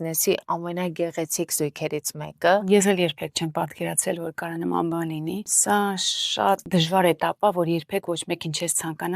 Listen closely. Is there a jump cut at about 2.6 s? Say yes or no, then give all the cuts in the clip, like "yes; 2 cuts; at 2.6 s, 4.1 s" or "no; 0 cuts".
yes; 3 cuts; at 2.6 s, 5.5 s, 6.6 s